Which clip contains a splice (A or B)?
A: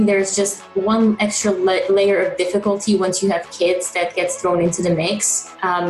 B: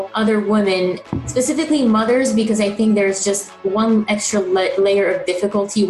B